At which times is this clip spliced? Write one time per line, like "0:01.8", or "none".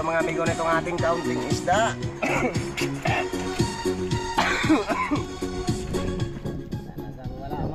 none